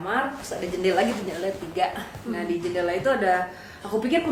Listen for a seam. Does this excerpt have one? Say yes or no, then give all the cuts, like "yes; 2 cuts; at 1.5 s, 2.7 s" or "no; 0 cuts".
no; 0 cuts